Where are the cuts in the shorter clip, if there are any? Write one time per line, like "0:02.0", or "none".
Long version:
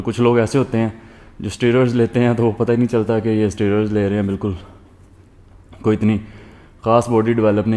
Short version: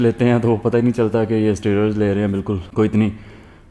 0:02.7